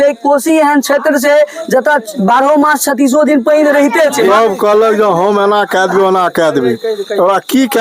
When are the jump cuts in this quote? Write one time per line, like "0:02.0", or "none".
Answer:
0:04.3